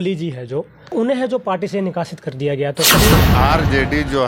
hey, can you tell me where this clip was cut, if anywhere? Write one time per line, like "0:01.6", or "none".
0:00.9
0:03.1